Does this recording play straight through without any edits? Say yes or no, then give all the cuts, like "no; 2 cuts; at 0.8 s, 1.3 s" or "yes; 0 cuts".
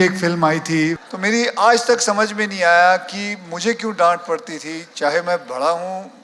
no; 1 cut; at 1.0 s